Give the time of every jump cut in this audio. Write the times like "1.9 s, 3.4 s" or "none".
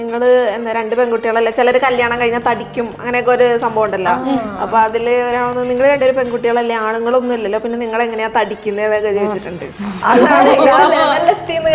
none